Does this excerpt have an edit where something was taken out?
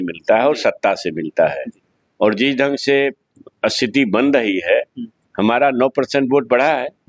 no; 0 cuts

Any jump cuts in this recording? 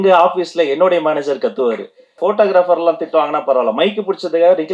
yes; 1 cut; at 2.2 s

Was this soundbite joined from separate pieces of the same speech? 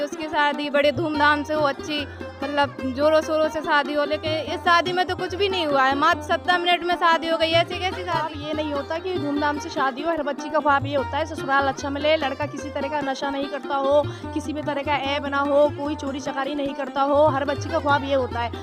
yes; 1 cut; at 8.4 s

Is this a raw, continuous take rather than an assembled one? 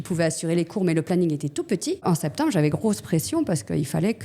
no; 1 cut; at 2.0 s

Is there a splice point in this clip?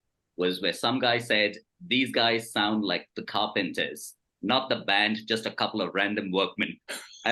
no; 0 cuts

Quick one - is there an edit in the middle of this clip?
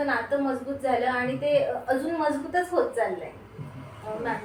no; 0 cuts

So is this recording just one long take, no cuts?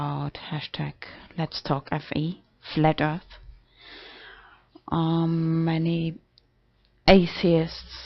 yes; 0 cuts

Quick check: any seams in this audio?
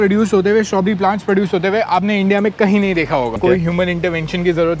yes; 1 cut; at 3.4 s

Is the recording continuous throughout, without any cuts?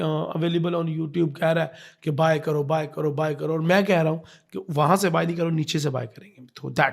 yes; 0 cuts

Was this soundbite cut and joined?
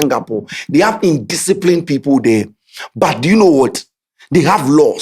no; 0 cuts

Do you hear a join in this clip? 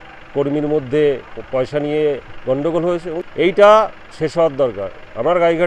yes; 1 cut; at 3.1 s

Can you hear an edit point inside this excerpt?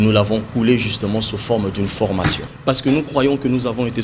yes; 1 cut; at 2.5 s

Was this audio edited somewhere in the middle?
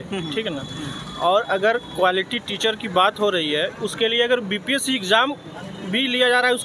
no; 0 cuts

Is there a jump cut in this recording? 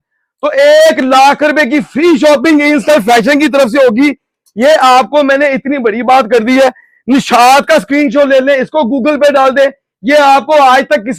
no; 0 cuts

